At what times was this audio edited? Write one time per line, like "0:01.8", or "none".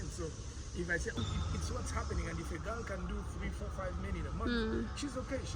0:01.2